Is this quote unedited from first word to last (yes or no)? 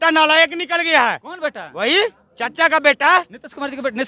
yes